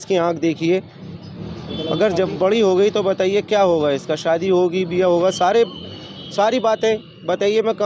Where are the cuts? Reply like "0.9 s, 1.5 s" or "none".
none